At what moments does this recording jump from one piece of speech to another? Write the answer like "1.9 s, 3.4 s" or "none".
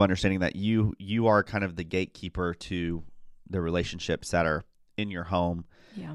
none